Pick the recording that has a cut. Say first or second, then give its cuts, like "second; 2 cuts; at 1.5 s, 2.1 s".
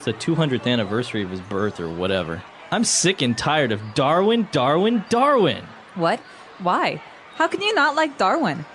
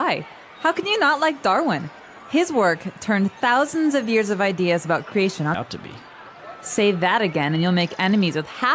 second; 1 cut; at 5.5 s